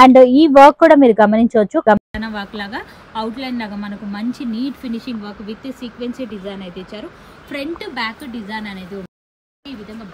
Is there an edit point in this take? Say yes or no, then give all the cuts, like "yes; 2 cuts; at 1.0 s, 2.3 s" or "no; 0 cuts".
no; 0 cuts